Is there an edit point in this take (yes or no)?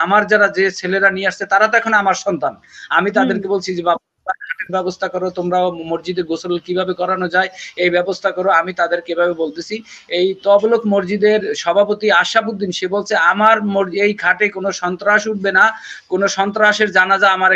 no